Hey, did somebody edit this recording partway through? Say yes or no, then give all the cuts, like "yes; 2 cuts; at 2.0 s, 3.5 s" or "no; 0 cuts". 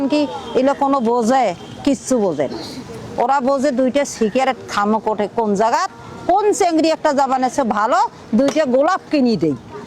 no; 0 cuts